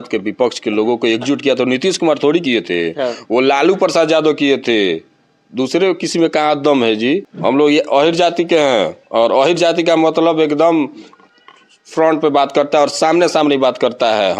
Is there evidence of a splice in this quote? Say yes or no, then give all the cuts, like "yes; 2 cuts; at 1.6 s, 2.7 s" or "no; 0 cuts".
yes; 1 cut; at 7.3 s